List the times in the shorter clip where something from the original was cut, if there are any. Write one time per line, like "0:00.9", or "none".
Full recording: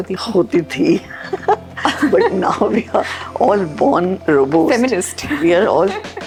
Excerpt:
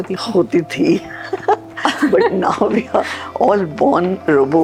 none